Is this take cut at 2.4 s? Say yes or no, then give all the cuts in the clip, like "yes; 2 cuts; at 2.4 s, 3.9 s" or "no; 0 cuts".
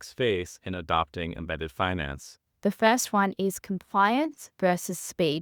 yes; 1 cut; at 2.4 s